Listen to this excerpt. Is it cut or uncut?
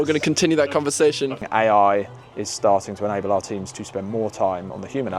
cut